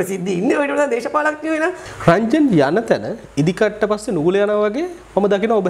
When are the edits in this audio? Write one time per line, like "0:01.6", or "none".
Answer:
0:01.9